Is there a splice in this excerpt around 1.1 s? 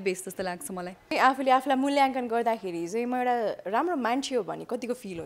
yes; 1 cut; at 1.1 s

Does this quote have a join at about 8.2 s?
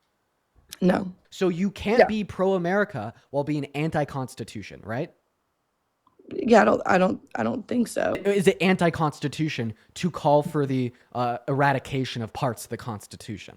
yes; 2 cuts; at 1.2 s, 8.2 s

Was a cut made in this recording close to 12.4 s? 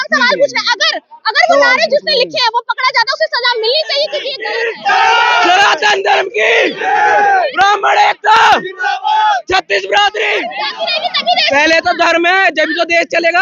no; 2 cuts; at 4.3 s, 10.6 s

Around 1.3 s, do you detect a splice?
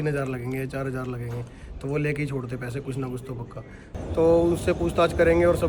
no; 1 cut; at 3.9 s

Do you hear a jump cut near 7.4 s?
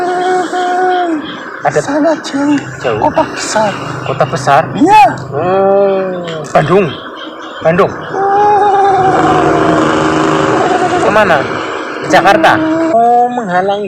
no; 1 cut; at 12.9 s

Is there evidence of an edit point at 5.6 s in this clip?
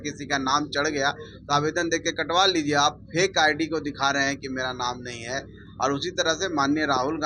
no; 0 cuts

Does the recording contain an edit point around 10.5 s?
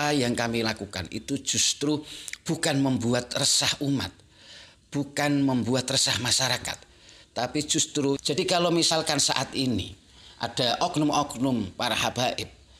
no; 1 cut; at 8.2 s

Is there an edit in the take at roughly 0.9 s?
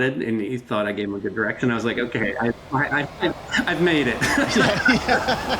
no; 0 cuts

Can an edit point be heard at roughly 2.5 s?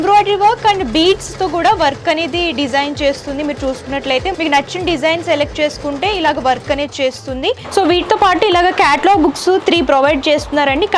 no; 2 cuts; at 4.3 s, 7.6 s

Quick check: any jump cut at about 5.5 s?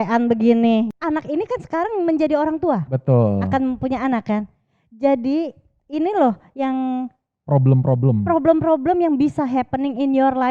no; 1 cut; at 0.9 s

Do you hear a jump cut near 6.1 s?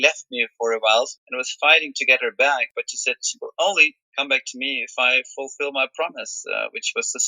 no; 2 cuts; at 1.2 s, 2.7 s

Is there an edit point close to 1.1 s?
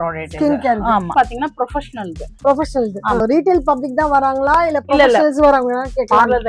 yes; 2 cuts; at 1.1 s, 3.2 s

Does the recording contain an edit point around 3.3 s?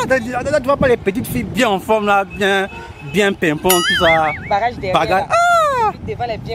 no; 0 cuts

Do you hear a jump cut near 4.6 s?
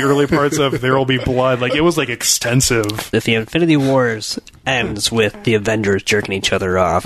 no; 1 cut; at 3.1 s

